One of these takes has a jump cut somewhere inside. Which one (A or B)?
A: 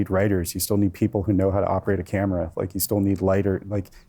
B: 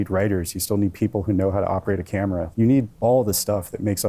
B